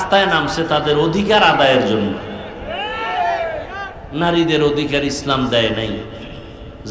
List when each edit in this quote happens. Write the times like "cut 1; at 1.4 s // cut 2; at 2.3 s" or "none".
cut 1; at 3.9 s